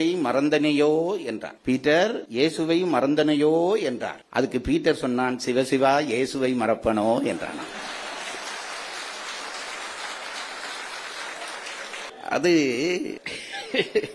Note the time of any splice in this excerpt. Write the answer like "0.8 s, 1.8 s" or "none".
none